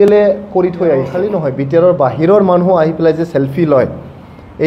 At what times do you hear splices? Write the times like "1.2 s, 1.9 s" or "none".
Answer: 1.2 s

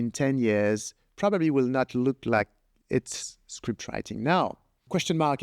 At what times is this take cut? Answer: none

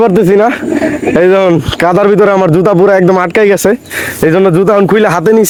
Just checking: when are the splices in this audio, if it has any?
none

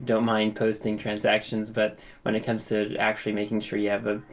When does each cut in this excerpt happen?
none

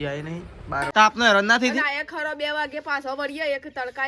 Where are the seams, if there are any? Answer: 0.9 s

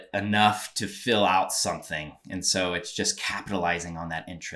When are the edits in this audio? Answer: none

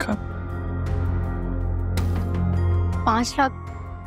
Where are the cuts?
2.7 s

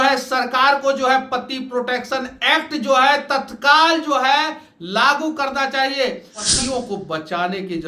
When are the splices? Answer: 6.5 s

